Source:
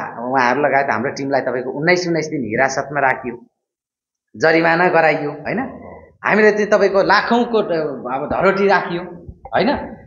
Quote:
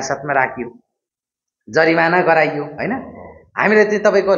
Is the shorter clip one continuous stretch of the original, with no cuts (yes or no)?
yes